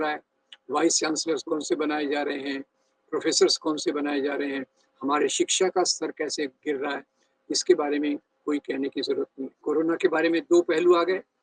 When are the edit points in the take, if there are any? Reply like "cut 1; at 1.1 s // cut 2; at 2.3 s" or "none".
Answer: cut 1; at 9.6 s